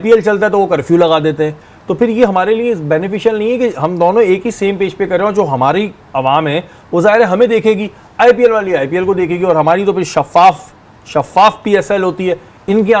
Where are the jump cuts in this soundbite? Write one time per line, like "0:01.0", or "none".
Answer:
none